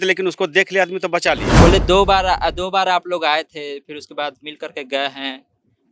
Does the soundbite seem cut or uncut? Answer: cut